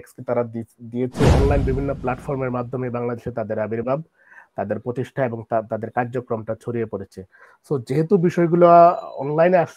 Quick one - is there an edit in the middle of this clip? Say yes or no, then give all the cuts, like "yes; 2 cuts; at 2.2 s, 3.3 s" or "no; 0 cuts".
yes; 1 cut; at 1.3 s